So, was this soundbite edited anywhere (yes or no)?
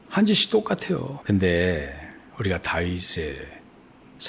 yes